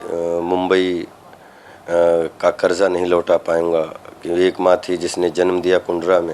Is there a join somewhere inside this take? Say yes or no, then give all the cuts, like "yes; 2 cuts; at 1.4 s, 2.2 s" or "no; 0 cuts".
no; 0 cuts